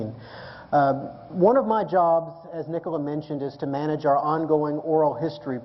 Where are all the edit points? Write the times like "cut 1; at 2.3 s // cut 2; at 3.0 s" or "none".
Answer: cut 1; at 4.1 s